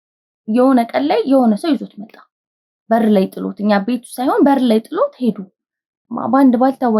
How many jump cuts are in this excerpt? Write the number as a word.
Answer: one